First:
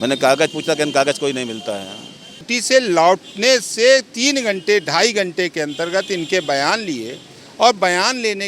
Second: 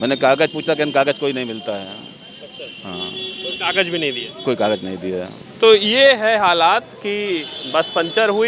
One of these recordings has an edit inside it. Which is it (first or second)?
first